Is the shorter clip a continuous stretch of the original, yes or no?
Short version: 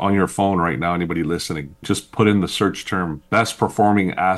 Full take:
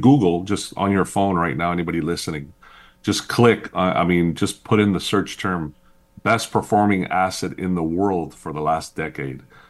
no